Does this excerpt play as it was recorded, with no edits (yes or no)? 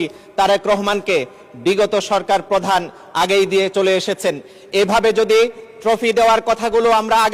yes